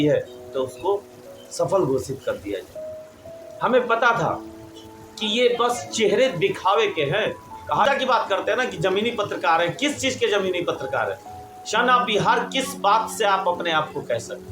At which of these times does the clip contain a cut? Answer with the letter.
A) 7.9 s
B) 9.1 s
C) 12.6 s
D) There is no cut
A